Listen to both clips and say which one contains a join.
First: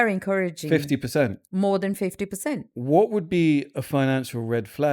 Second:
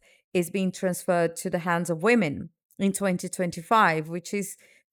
first; 1 cut; at 2.7 s

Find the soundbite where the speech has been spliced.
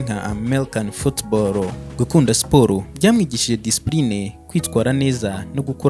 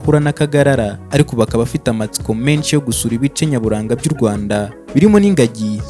second; 1 cut; at 1.0 s

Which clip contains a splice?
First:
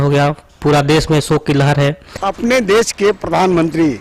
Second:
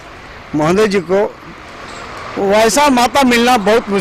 first; 1 cut; at 2.1 s

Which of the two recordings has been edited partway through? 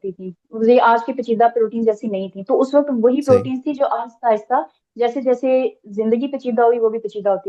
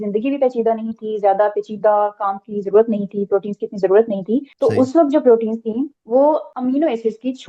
second; 3 cuts; at 4.5 s, 6.0 s, 6.5 s

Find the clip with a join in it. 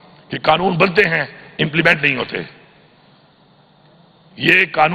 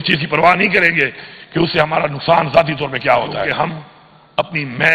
second; 1 cut; at 3.5 s

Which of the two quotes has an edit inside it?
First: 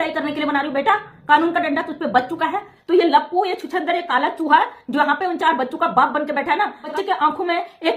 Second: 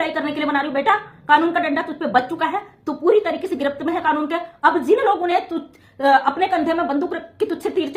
first; 2 cuts; at 2.7 s, 6.9 s

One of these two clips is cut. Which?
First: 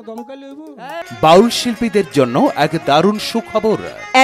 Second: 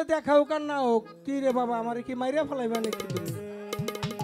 first; 1 cut; at 1.0 s

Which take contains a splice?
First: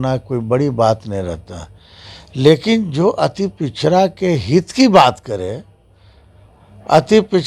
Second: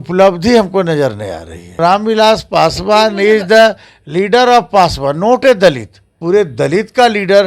second; 2 cuts; at 1.8 s, 6.2 s

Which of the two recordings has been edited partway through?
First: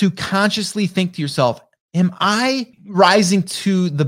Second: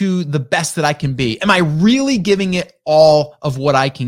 first; 1 cut; at 2.8 s

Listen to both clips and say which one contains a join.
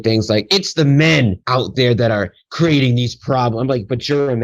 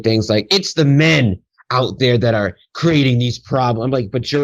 first; 1 cut; at 1.4 s

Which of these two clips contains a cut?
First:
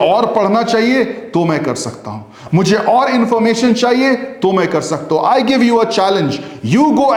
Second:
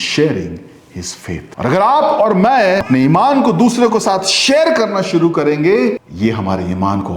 second; 3 cuts; at 1.5 s, 2.8 s, 6.1 s

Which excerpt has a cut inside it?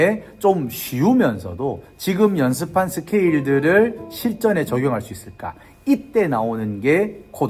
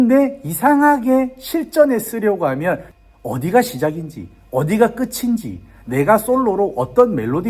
second; 1 cut; at 2.9 s

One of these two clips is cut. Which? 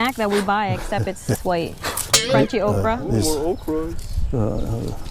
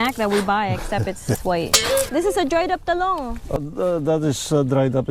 second; 2 cuts; at 2.1 s, 3.6 s

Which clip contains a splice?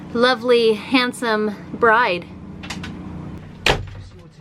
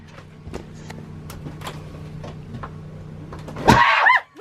first; 1 cut; at 3.3 s

